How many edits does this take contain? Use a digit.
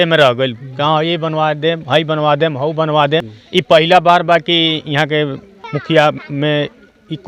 2